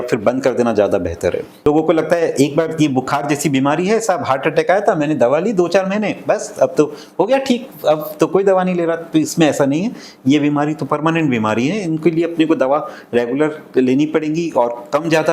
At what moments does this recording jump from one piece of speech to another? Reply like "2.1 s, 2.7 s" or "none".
1.7 s